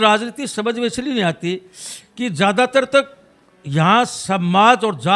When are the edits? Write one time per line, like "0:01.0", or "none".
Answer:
none